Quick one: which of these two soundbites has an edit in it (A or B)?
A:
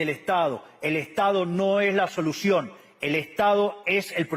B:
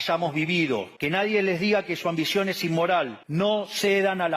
B